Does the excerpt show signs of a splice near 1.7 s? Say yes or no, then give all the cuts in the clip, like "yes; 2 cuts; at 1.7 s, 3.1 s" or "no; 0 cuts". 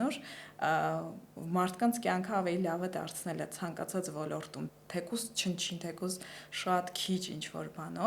no; 1 cut; at 4.7 s